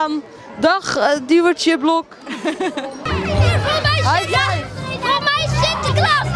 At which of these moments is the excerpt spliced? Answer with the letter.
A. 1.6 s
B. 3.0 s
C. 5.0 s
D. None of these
B